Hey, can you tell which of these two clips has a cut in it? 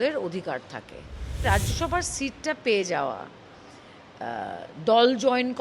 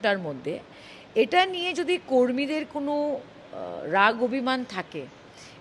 first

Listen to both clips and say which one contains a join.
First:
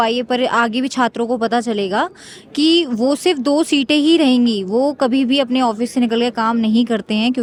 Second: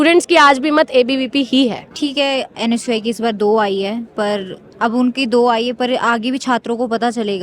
second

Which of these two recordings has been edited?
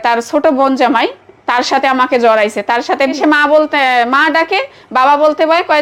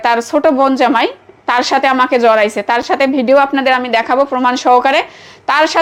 first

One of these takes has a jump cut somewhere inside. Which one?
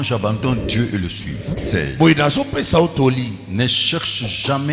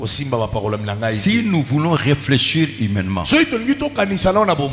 first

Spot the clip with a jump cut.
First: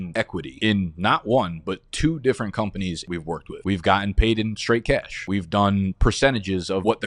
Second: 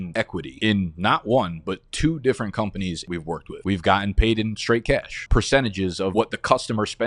second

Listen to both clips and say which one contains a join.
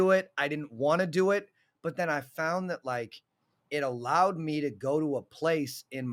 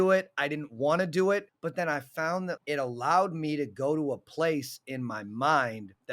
second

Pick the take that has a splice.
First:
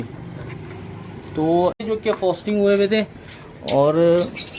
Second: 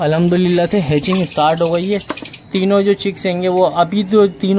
first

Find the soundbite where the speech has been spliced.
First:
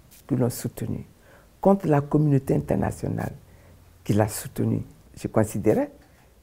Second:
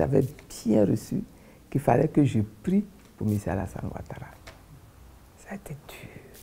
first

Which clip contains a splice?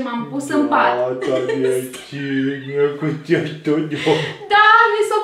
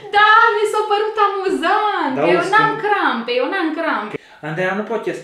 second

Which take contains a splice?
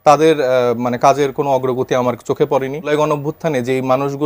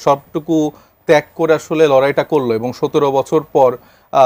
first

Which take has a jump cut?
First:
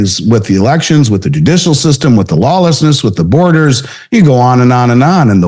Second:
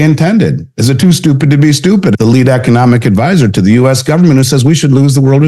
second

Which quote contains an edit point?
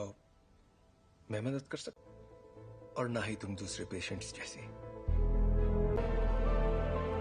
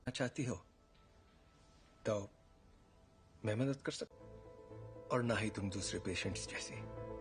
first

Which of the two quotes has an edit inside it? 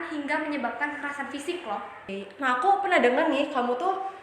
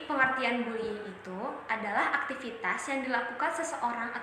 first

